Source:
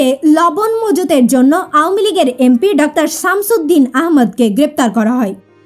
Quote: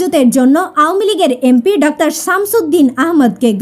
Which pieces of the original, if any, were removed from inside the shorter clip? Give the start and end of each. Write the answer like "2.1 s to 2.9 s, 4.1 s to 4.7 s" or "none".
none

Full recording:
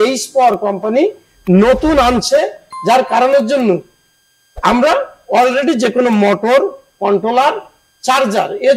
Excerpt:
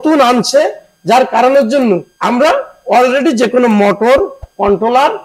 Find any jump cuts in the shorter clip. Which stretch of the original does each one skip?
3.9 s to 4.5 s

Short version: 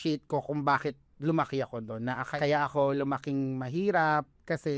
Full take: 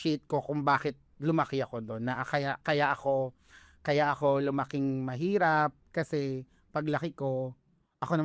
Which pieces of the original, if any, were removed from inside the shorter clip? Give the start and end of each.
2.3 s to 3.7 s

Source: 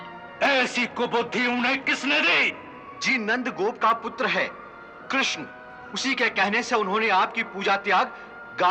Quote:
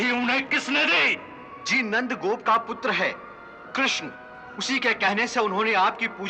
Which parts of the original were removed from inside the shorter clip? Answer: none

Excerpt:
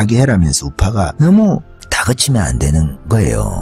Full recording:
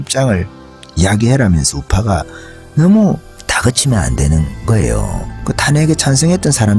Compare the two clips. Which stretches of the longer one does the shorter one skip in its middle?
2.2 s to 2.7 s

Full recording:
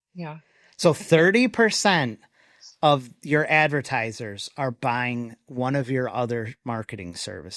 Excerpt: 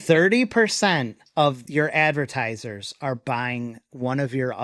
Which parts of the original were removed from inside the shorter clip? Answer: 2.6 s to 3.1 s

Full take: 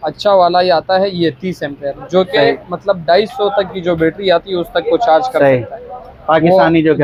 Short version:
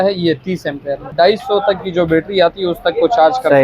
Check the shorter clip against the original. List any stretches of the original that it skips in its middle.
2.1 s to 3.0 s

